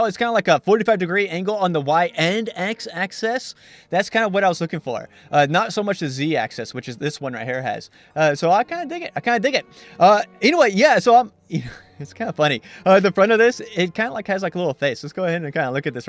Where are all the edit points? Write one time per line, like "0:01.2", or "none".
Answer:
0:10.7